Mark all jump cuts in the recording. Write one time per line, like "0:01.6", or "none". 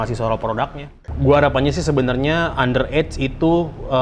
0:00.9